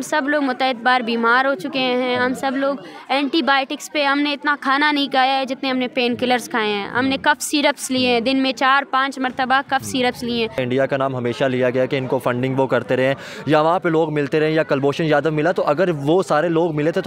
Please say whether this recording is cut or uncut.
cut